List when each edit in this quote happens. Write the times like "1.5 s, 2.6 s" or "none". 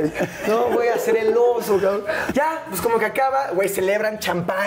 2.2 s